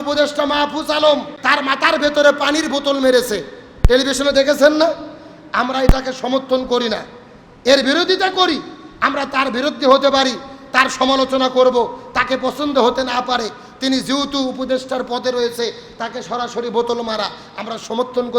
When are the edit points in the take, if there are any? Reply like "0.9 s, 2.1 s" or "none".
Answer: 1.4 s

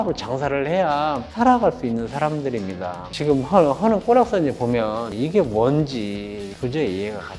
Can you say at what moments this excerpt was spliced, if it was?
1.3 s, 3.1 s, 6.5 s

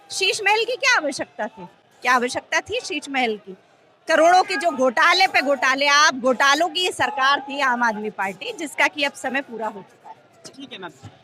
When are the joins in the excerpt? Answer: none

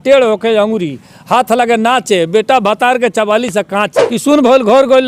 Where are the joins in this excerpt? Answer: 4.0 s

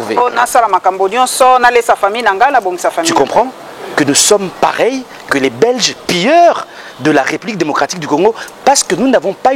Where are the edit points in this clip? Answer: none

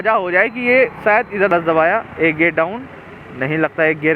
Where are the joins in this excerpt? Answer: 1.5 s

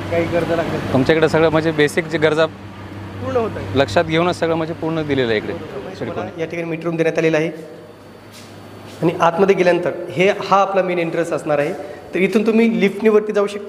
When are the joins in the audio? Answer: 6.2 s

